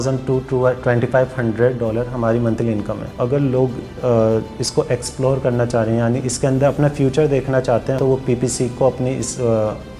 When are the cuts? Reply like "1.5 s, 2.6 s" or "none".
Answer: 3.2 s, 8.0 s